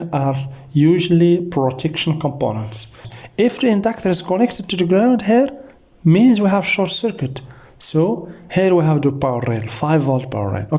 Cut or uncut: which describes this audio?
cut